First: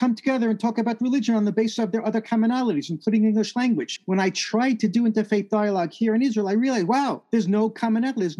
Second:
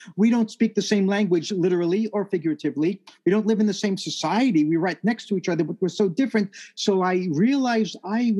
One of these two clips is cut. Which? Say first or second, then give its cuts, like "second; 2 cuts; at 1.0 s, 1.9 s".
first; 2 cuts; at 3.9 s, 7.2 s